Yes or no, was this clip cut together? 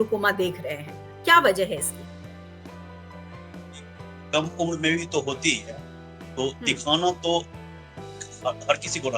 no